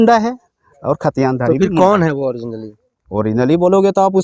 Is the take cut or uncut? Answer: uncut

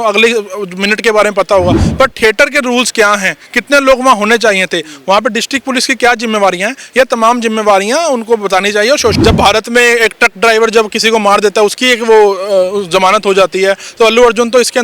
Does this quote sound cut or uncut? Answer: cut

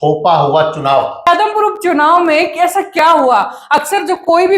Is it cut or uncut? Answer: cut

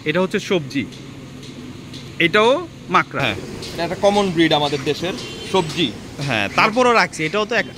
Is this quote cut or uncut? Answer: cut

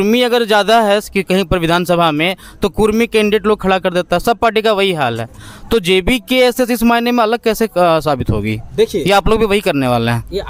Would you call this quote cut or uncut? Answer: uncut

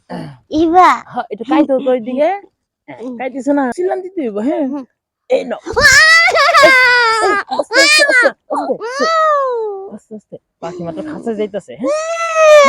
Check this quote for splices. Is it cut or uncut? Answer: cut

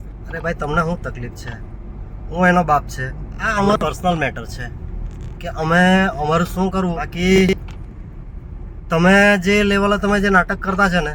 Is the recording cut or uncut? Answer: cut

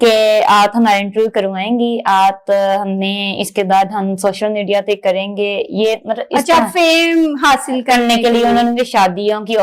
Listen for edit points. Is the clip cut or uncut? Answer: uncut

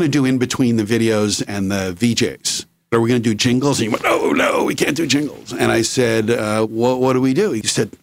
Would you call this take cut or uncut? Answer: uncut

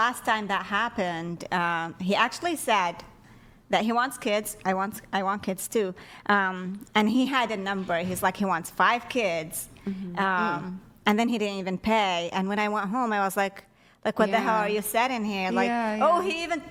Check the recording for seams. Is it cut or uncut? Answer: uncut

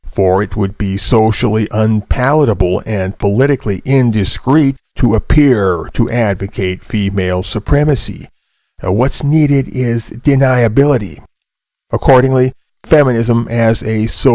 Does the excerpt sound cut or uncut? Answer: cut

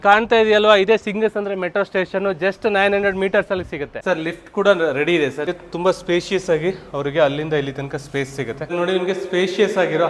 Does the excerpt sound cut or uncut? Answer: cut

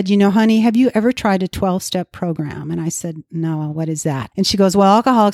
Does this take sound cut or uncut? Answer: cut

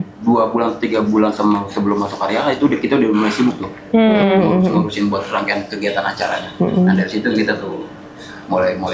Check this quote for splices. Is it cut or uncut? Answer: uncut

